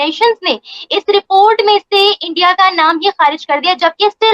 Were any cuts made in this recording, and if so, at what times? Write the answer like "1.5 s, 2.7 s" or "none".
none